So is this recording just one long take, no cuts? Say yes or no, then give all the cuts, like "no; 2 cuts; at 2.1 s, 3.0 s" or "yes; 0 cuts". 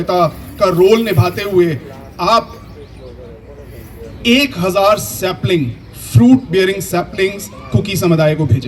yes; 0 cuts